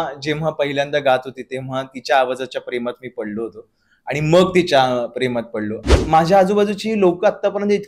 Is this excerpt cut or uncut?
cut